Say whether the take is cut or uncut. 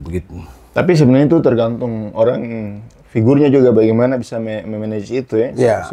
uncut